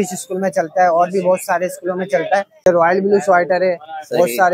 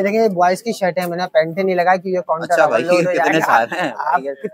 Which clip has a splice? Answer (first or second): first